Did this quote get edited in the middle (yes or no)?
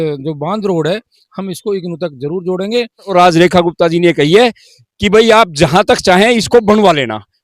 yes